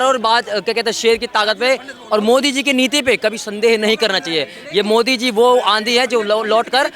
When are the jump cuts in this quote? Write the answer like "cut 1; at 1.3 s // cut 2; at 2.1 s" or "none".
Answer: none